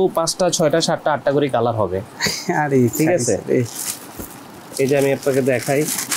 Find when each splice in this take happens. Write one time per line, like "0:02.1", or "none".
none